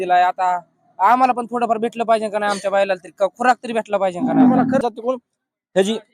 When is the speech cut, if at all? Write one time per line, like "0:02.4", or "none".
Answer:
0:04.8